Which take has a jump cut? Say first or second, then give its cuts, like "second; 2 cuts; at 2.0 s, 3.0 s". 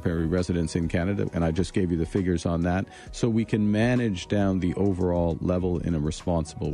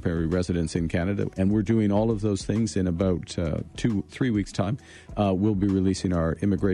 second; 1 cut; at 1.3 s